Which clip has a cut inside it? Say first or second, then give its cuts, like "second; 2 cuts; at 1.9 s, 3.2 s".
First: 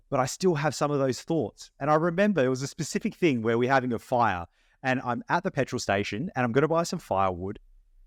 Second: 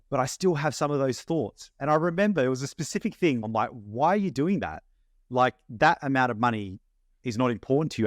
second; 1 cut; at 3.4 s